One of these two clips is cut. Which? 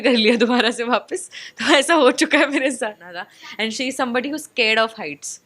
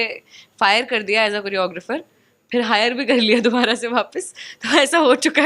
first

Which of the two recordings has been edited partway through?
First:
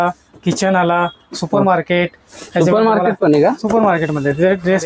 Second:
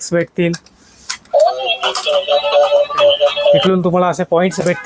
second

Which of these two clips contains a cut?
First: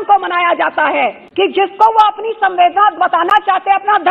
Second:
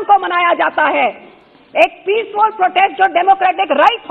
first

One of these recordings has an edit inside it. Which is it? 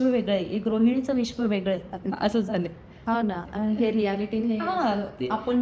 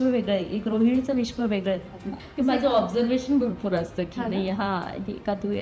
second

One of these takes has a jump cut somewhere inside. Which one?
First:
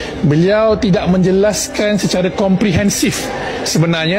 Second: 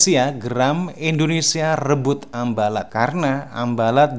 second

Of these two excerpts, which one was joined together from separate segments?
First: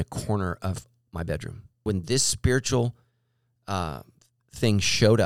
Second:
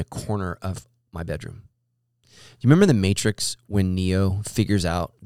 first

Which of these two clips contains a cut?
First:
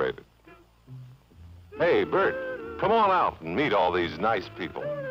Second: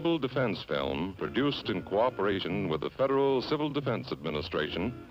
first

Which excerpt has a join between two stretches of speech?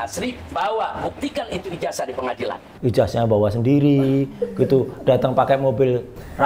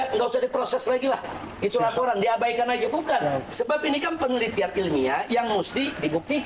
first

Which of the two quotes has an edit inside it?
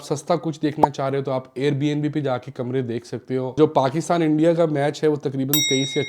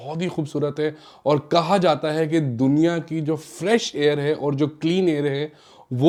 first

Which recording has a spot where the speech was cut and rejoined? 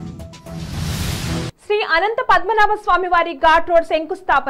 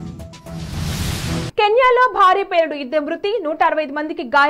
second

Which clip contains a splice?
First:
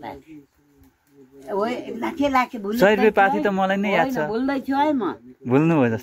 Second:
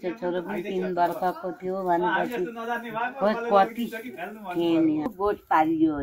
second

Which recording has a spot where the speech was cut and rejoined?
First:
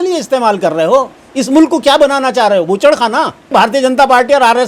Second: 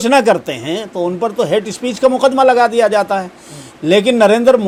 first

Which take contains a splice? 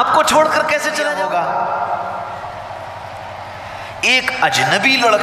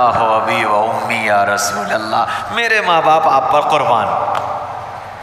first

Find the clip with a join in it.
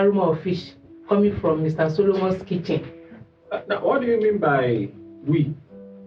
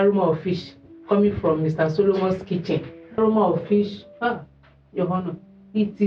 second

